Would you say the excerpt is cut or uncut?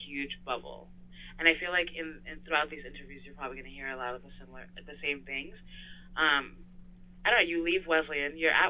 uncut